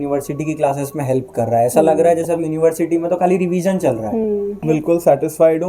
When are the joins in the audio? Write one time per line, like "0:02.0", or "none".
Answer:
0:04.6